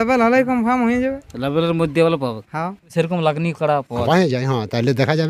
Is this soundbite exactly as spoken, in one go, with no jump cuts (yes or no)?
no